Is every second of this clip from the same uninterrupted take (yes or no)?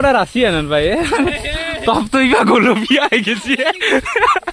yes